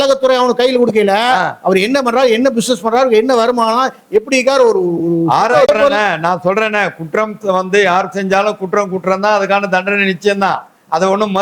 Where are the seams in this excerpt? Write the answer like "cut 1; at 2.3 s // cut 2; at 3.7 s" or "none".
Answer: cut 1; at 5.7 s